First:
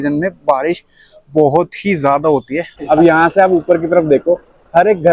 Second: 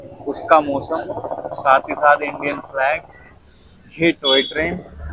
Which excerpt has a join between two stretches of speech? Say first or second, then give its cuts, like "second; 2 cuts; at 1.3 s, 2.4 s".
first; 1 cut; at 2.8 s